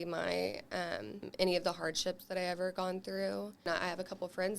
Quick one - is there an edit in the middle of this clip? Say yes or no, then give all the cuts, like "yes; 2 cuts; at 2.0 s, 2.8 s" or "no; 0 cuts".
yes; 2 cuts; at 1.3 s, 3.6 s